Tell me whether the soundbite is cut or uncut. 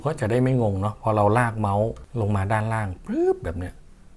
cut